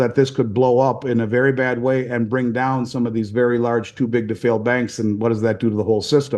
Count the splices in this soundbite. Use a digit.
0